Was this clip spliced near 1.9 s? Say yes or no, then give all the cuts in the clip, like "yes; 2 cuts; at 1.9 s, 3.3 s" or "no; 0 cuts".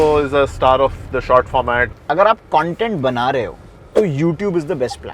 yes; 1 cut; at 1.9 s